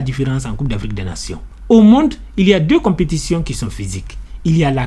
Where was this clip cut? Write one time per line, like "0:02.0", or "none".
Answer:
none